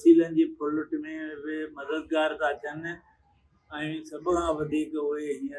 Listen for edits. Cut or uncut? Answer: uncut